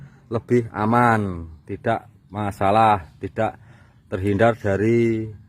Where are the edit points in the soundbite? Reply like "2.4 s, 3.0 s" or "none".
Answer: none